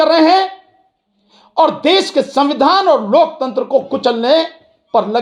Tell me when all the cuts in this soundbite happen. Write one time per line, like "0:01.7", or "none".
none